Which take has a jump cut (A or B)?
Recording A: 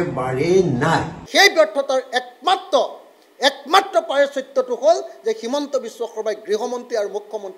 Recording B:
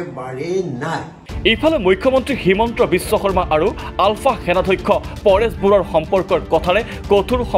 A